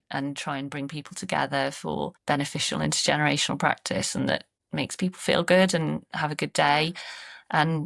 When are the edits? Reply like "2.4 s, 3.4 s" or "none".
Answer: none